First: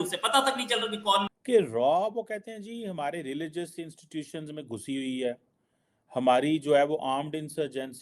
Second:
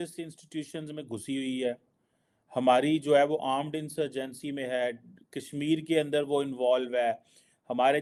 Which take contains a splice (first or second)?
first